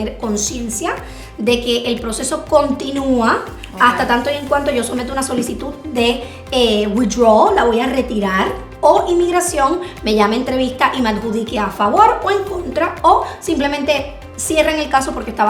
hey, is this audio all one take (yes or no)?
yes